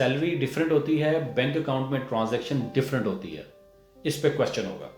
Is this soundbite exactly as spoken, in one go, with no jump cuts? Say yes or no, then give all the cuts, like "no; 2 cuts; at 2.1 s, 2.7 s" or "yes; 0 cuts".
yes; 0 cuts